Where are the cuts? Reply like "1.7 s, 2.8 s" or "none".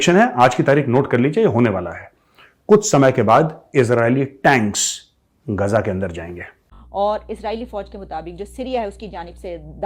6.4 s